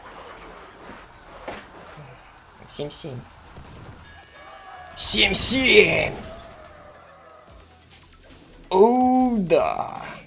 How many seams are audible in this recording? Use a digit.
1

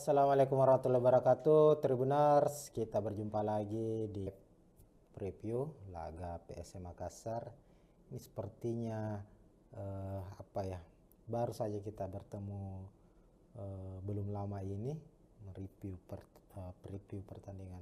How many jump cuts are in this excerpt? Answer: 1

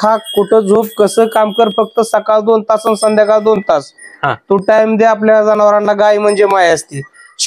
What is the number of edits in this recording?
0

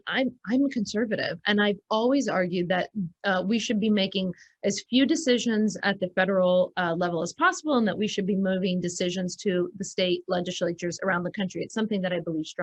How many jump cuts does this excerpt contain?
0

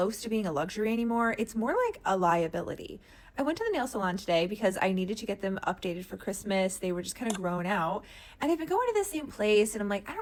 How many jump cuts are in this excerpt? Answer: 0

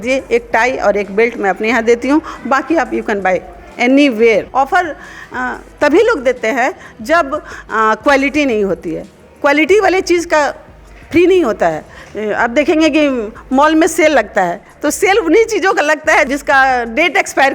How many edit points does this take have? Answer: 2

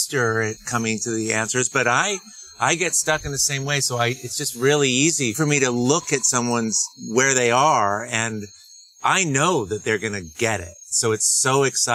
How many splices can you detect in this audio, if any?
1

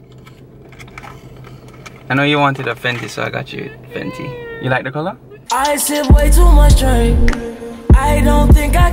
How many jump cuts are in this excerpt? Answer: 1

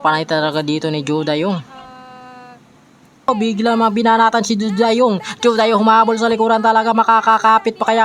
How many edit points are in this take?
1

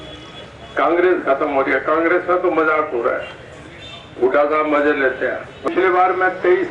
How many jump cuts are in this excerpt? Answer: 1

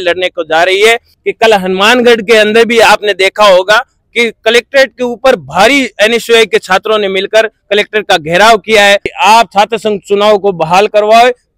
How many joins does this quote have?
2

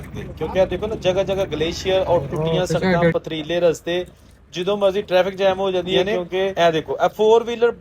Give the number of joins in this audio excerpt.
1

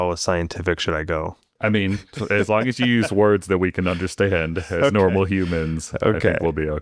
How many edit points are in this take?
1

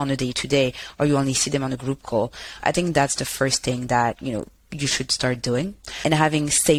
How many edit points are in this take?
0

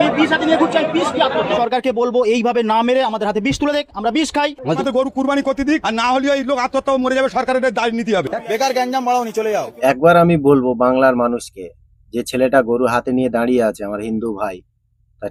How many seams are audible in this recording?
4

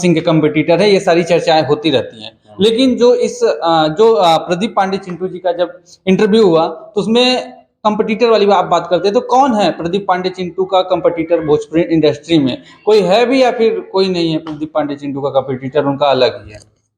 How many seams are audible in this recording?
0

